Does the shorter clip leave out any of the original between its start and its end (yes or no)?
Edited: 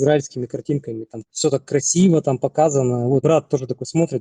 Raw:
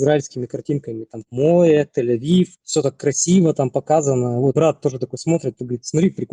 yes